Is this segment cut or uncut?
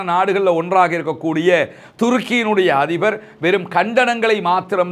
uncut